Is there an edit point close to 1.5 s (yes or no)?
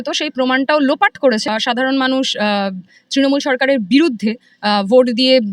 yes